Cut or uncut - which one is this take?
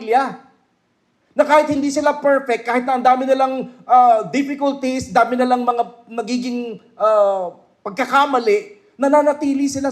uncut